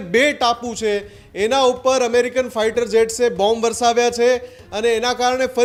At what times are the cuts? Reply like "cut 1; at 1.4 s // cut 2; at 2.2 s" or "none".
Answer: none